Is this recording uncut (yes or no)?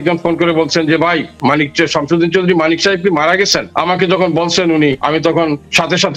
no